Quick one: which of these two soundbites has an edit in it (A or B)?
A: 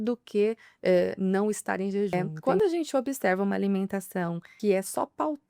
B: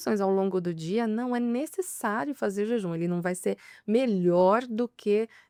A